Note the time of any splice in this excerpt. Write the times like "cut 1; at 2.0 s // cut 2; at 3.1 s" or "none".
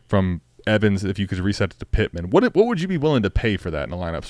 none